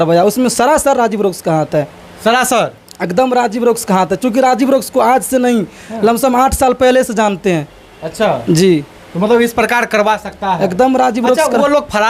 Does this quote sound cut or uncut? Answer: uncut